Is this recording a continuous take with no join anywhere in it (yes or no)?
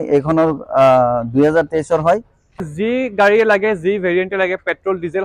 no